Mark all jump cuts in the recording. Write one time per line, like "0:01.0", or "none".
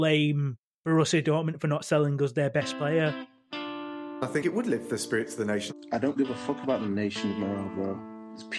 0:03.2